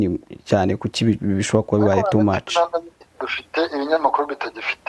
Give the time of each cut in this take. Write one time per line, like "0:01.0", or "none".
0:03.0